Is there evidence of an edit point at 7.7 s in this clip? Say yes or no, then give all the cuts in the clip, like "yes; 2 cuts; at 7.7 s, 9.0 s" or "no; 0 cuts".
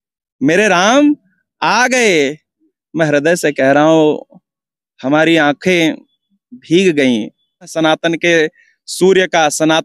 yes; 1 cut; at 7.7 s